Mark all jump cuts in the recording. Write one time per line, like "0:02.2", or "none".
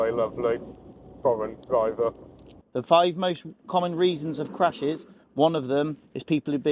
0:02.6